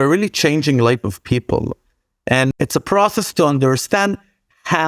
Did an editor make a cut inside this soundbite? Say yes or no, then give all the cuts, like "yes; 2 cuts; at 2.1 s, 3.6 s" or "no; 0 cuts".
yes; 1 cut; at 2.5 s